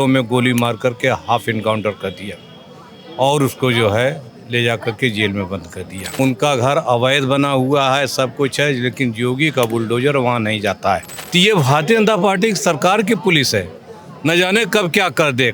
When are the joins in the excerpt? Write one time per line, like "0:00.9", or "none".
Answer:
0:06.0
0:11.1